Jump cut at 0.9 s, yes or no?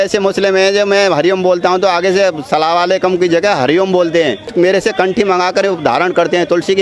no